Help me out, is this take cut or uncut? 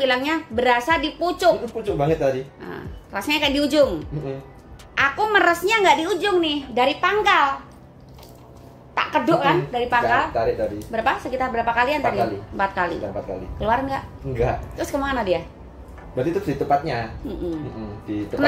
uncut